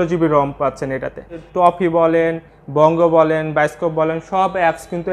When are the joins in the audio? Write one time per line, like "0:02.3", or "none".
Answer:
0:01.4